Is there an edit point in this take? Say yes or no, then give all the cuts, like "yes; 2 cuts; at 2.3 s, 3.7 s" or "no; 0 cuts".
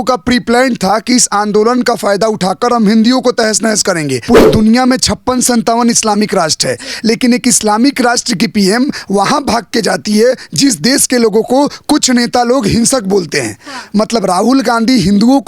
yes; 1 cut; at 4.2 s